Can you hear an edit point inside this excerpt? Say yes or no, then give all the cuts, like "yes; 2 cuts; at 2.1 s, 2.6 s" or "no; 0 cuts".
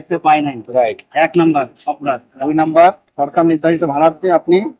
no; 0 cuts